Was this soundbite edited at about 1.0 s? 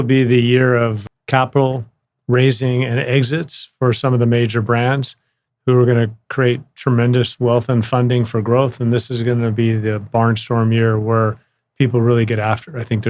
yes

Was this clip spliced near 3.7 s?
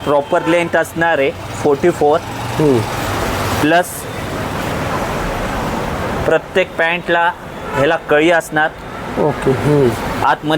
no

